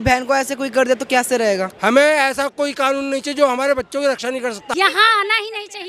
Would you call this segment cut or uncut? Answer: cut